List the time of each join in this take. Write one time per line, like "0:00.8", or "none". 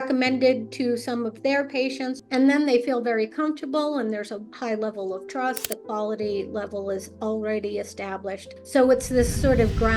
0:02.2
0:08.5